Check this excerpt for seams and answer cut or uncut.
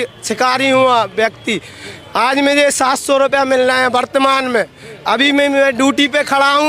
uncut